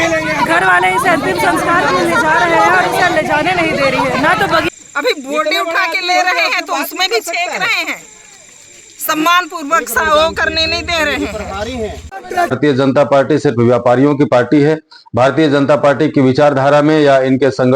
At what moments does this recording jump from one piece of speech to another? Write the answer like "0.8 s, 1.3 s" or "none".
4.7 s, 12.5 s